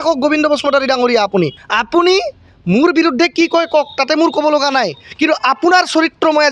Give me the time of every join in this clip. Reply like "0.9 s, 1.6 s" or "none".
1.6 s